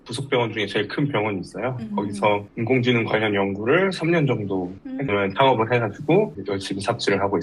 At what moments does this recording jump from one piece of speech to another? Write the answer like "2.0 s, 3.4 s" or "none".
5.1 s